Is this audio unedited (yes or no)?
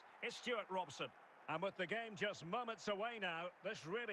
no